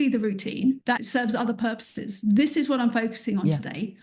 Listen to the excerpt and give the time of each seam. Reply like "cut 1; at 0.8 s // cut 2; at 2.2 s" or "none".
cut 1; at 0.9 s